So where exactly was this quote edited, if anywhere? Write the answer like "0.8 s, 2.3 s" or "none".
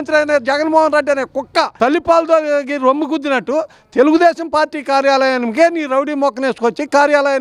1.7 s

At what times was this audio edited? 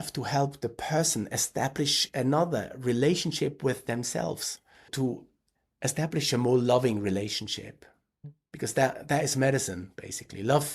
none

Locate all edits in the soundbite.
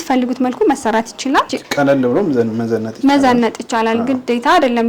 1.5 s

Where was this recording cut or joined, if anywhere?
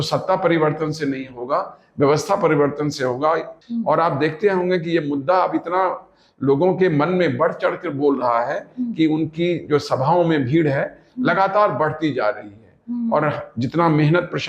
3.6 s

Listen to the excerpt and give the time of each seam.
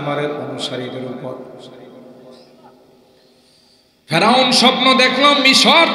none

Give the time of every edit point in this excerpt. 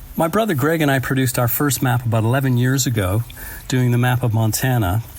none

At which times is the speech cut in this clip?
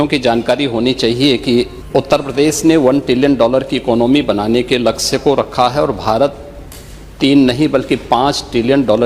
1.8 s

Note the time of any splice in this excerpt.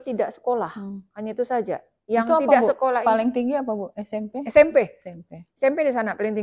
none

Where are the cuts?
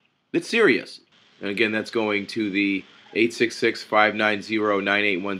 1.0 s

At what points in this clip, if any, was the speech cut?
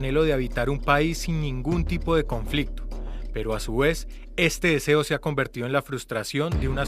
3.5 s

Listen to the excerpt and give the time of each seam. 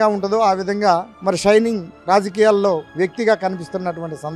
none

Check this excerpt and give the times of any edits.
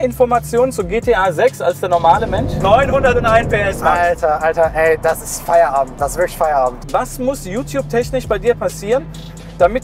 2.5 s, 6.8 s

